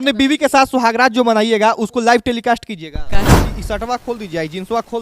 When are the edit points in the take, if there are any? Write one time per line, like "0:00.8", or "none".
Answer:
0:03.3